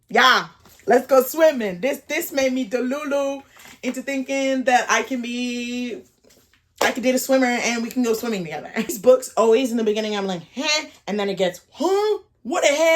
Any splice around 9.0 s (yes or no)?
yes